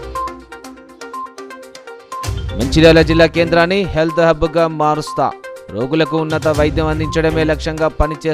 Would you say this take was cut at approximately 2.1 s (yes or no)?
no